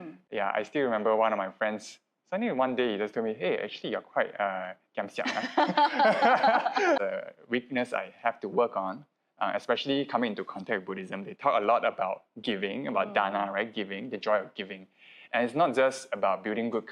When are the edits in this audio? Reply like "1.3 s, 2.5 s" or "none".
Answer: 7.0 s